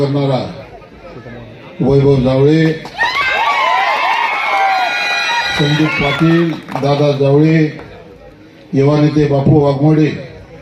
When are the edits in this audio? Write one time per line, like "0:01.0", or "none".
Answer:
none